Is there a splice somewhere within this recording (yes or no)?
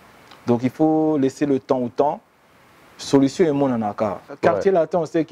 yes